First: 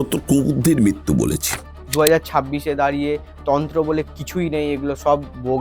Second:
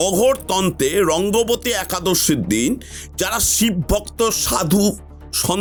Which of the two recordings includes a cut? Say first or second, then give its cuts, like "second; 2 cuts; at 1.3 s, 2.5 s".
first; 1 cut; at 1.8 s